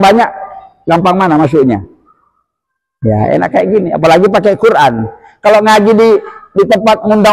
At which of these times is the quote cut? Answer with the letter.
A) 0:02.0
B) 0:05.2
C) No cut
C